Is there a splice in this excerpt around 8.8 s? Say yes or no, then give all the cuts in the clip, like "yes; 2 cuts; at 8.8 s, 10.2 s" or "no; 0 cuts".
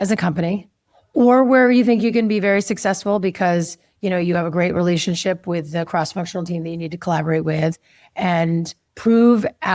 yes; 1 cut; at 8.8 s